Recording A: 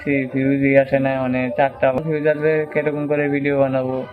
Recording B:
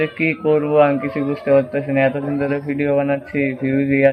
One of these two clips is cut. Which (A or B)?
A